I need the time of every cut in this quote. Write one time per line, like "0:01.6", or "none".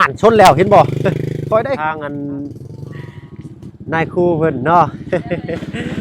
0:01.8